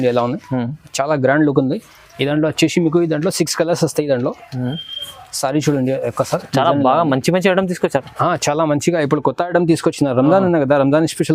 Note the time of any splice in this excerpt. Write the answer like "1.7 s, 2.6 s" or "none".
none

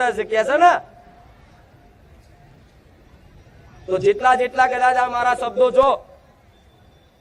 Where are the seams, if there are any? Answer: none

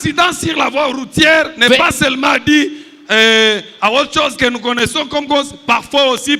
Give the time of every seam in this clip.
none

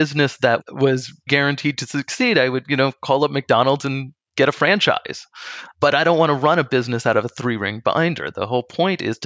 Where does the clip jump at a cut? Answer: 1.3 s

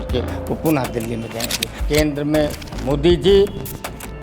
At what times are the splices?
1.7 s

